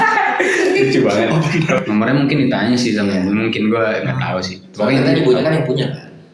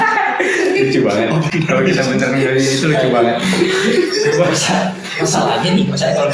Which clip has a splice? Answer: first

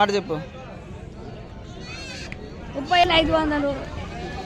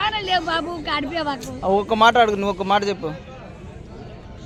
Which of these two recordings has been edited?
first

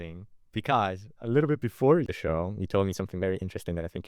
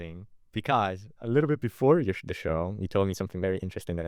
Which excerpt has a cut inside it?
first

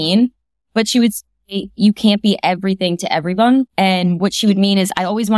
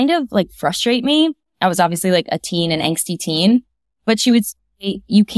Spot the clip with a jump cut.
first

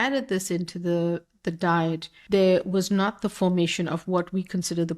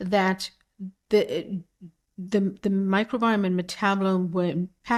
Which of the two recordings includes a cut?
first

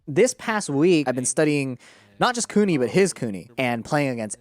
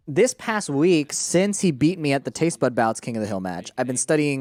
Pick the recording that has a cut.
first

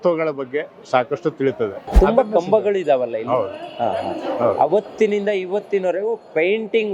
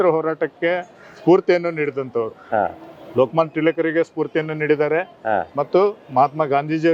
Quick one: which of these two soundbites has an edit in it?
first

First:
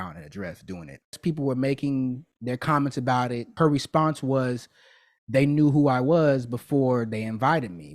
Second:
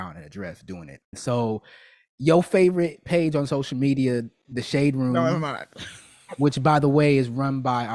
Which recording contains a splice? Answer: first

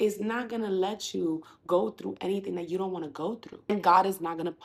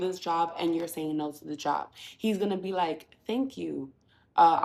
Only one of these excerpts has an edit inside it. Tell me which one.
first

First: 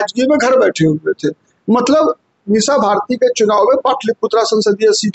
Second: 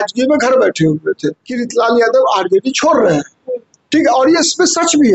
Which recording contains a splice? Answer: second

